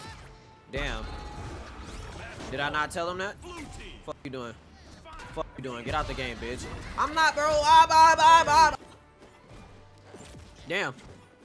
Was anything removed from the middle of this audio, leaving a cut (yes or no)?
no